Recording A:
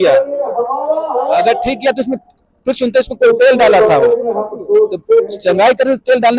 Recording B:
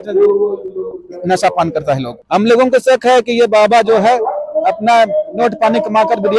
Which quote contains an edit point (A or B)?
B